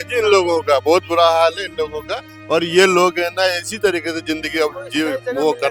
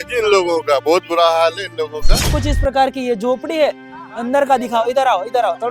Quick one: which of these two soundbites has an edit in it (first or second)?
second